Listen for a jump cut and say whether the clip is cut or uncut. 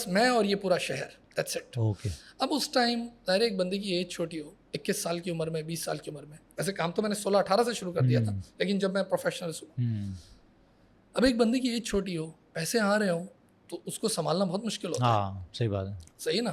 uncut